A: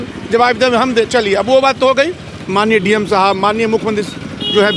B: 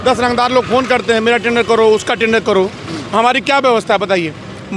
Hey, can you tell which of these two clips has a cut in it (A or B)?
A